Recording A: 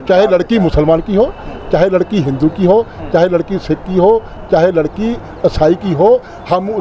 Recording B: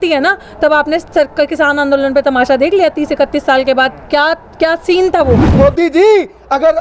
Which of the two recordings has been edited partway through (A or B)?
B